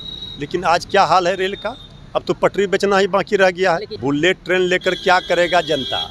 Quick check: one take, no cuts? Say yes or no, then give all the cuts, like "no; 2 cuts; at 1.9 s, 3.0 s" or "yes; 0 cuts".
no; 1 cut; at 3.9 s